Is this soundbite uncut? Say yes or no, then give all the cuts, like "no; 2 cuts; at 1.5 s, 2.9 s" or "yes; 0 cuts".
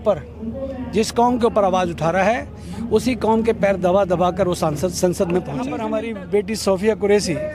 no; 1 cut; at 5.8 s